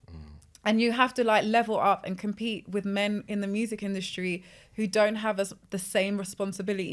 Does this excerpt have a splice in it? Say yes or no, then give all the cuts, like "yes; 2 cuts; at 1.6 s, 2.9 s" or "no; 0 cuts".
no; 0 cuts